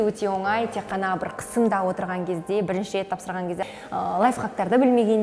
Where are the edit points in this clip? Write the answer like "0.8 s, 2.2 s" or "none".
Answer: 3.6 s